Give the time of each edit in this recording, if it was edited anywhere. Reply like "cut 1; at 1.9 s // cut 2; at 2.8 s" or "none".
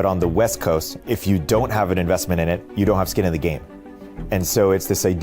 cut 1; at 0.9 s // cut 2; at 2.7 s // cut 3; at 3.9 s